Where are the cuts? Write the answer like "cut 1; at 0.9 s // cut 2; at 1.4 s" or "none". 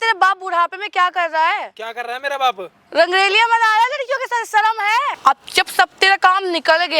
cut 1; at 5.1 s